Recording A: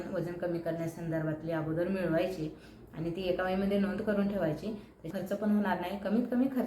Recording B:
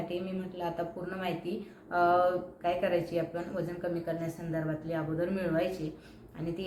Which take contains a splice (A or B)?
A